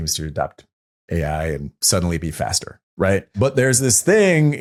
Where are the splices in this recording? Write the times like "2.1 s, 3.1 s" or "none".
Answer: none